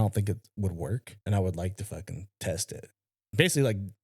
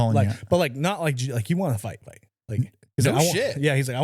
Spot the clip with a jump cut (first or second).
first